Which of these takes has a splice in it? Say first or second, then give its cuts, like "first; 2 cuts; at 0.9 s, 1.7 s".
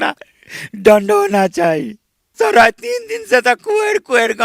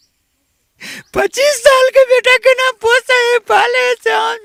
first; 1 cut; at 2.3 s